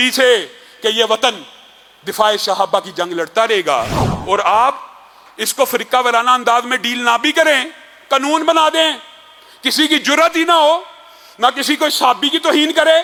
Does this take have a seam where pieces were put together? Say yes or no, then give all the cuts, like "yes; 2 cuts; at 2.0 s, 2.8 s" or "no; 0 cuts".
no; 0 cuts